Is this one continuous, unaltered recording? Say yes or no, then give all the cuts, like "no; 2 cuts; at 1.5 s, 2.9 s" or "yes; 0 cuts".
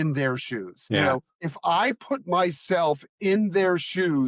no; 1 cut; at 1.1 s